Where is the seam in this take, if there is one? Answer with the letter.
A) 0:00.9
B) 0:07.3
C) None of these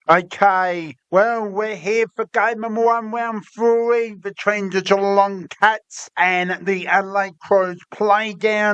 A